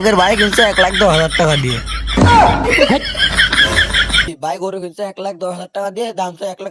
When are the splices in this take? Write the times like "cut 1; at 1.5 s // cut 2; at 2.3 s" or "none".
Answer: cut 1; at 4.3 s